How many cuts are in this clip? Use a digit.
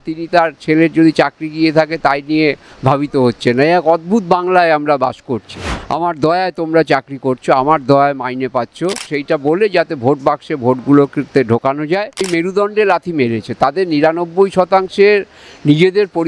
3